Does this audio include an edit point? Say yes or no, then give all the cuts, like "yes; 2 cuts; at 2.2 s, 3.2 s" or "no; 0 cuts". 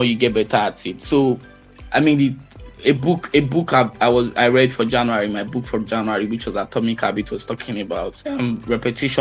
yes; 1 cut; at 8.2 s